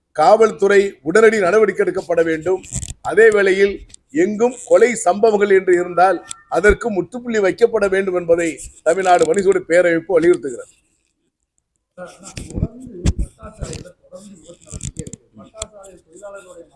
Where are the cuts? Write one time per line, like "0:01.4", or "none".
none